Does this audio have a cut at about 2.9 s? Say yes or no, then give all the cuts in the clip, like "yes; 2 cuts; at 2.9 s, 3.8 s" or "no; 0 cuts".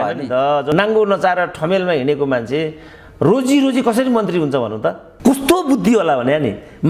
no; 2 cuts; at 0.7 s, 5.1 s